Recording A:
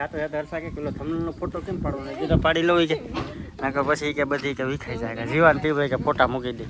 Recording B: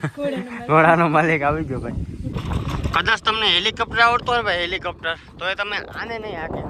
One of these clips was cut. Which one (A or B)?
B